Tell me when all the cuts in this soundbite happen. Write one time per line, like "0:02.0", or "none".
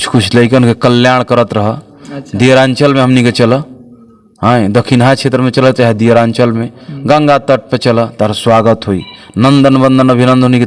none